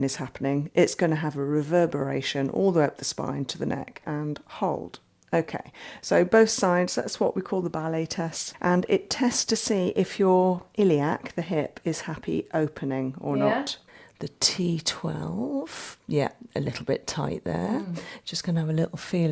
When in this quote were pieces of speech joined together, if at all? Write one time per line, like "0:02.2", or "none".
0:04.0
0:08.4
0:13.8